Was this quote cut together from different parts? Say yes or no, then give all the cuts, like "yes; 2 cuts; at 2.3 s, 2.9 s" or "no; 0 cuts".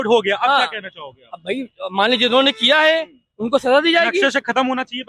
no; 0 cuts